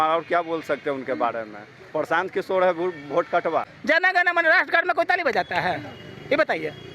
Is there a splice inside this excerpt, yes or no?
yes